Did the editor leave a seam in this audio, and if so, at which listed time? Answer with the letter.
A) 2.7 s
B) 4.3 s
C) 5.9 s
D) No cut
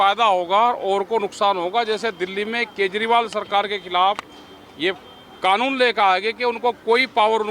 D